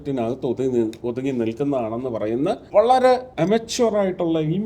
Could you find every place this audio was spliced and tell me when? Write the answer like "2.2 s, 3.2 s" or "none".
2.6 s, 3.3 s